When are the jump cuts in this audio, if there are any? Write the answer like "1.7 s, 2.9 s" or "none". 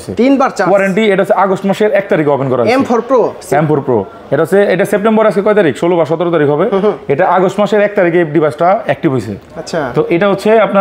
none

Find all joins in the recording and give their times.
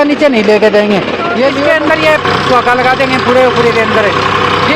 1.6 s

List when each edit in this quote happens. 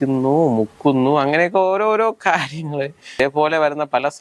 3.2 s

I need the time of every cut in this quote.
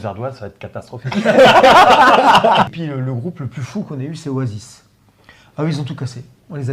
2.7 s

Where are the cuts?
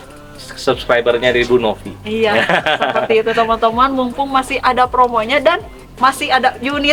none

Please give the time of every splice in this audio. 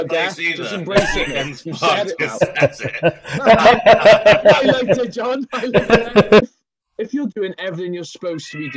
6.4 s

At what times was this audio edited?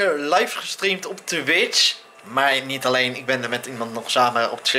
none

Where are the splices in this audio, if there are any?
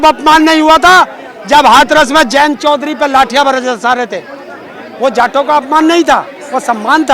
none

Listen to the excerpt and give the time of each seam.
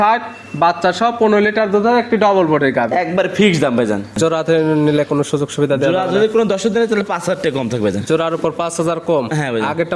4.2 s

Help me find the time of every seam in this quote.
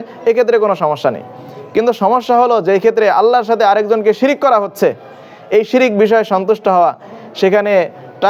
none

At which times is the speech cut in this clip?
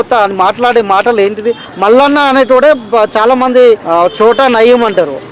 1.6 s, 3.8 s

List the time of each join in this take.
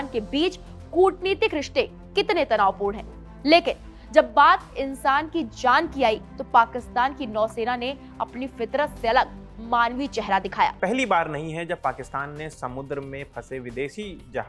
10.8 s

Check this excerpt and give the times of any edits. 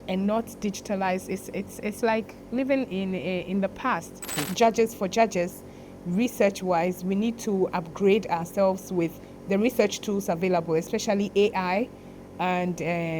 4.4 s

